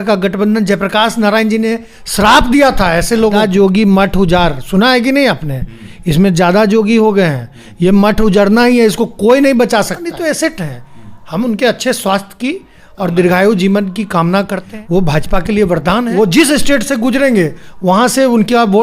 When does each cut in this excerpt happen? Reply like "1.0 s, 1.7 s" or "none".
3.4 s, 10.1 s, 14.6 s, 16.1 s